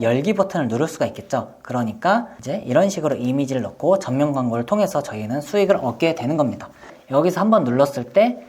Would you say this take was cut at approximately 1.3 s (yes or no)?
no